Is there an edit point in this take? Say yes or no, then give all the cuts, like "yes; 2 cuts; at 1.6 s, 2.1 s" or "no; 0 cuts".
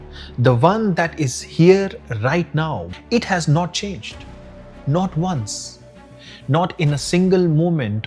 yes; 1 cut; at 2.9 s